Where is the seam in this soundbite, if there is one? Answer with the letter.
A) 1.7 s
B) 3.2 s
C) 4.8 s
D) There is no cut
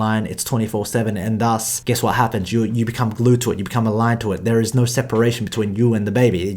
A